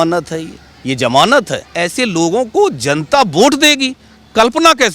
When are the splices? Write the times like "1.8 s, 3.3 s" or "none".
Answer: 1.6 s

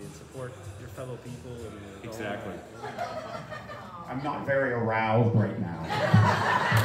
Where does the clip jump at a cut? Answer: 2.7 s

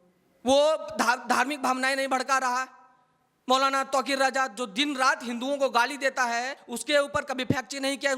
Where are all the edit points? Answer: 6.6 s

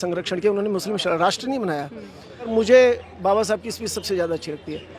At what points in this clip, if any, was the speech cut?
2.5 s

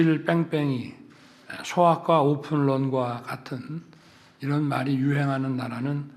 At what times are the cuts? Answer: none

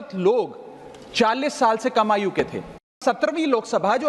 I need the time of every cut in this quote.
3.0 s

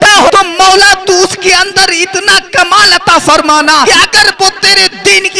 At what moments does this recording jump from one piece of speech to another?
none

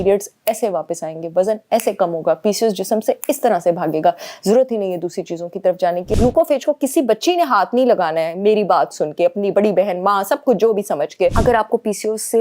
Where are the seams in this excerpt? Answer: 6.1 s, 11.4 s

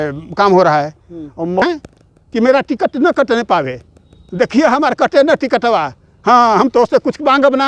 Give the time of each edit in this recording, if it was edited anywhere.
1.6 s

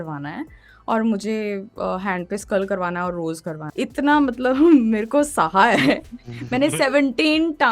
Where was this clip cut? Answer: 3.6 s

